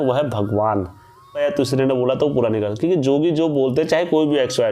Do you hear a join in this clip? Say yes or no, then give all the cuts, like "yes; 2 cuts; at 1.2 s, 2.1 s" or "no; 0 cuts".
yes; 1 cut; at 1.4 s